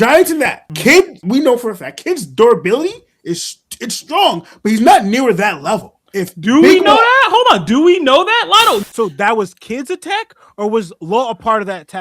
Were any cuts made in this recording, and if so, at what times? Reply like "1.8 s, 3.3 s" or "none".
8.8 s